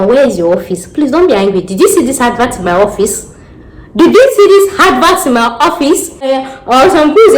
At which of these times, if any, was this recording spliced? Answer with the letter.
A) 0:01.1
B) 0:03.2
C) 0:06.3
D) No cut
C